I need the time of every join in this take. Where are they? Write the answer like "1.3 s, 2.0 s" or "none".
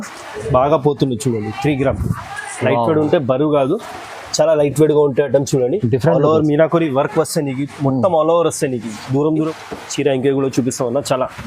9.5 s